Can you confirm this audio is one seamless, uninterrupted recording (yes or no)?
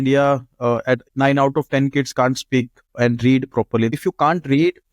no